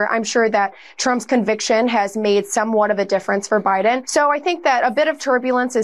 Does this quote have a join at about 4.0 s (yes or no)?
yes